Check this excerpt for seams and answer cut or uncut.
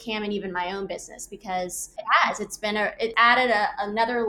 cut